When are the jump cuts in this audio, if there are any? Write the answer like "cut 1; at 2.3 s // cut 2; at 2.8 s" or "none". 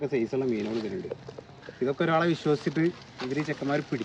none